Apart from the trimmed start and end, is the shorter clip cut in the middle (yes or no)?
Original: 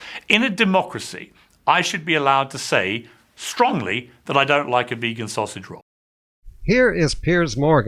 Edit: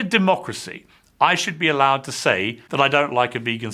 yes